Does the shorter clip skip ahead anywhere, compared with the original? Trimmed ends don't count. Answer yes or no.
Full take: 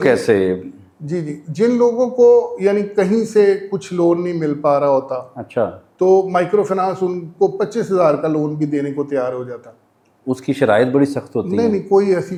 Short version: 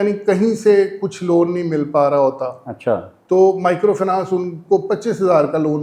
no